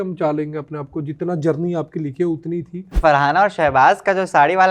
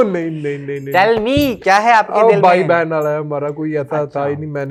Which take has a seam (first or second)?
first